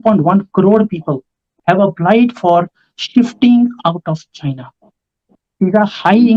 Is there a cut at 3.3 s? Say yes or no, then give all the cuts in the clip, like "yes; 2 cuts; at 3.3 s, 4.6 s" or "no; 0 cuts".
no; 2 cuts; at 1.5 s, 5.3 s